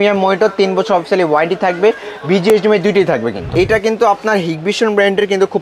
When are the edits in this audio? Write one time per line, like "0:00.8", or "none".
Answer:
0:03.5